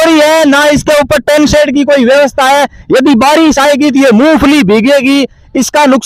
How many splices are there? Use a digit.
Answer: 0